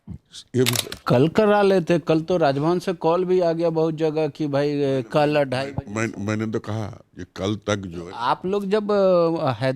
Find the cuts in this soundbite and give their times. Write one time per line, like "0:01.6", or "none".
0:00.9